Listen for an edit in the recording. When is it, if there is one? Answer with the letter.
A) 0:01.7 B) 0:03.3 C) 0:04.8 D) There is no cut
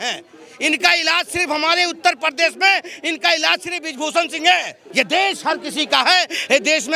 C